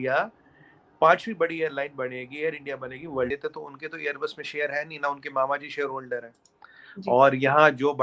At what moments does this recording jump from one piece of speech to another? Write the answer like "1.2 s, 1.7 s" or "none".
3.3 s